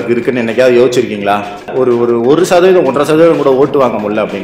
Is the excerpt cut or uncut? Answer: cut